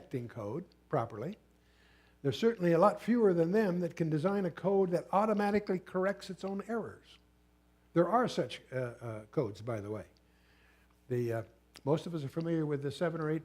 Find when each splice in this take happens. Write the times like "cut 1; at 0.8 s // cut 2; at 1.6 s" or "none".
cut 1; at 9.8 s